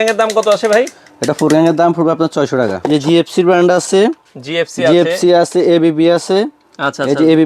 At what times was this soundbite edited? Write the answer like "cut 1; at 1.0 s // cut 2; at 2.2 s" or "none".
cut 1; at 2.8 s